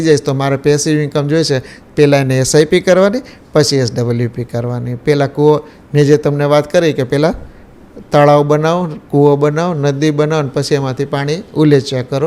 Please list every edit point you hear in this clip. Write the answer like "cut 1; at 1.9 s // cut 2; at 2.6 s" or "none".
none

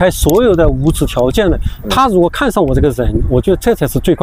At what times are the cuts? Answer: none

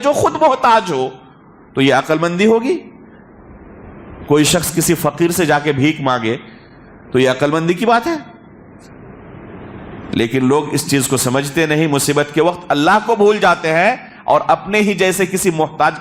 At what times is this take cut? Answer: none

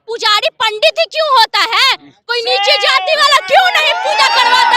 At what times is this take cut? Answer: none

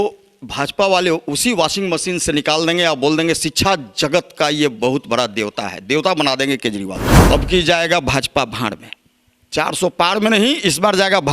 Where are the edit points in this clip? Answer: cut 1; at 7.1 s

